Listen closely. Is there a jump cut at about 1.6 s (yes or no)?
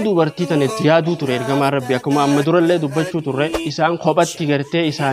no